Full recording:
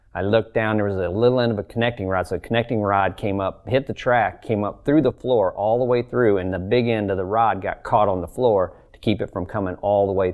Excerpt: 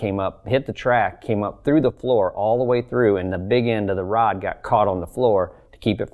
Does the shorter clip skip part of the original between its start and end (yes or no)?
no